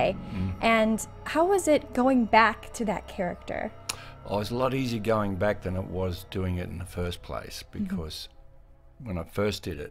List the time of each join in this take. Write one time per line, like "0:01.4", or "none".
0:08.7